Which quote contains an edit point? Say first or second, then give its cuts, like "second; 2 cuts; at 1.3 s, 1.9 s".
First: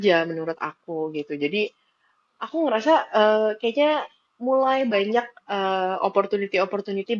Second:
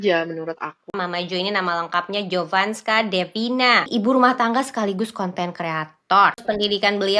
second; 3 cuts; at 0.9 s, 3.9 s, 6.4 s